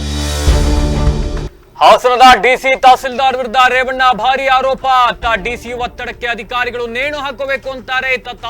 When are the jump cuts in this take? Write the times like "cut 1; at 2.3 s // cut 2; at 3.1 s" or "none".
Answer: cut 1; at 1.5 s